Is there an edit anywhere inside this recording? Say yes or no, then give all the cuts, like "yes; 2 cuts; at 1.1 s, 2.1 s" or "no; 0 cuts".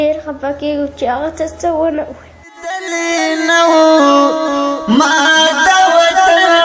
no; 0 cuts